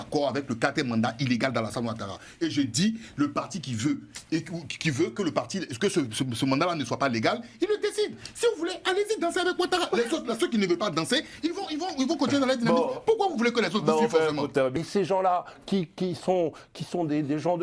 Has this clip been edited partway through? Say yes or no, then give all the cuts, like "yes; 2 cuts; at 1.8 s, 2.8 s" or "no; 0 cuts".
yes; 1 cut; at 14.8 s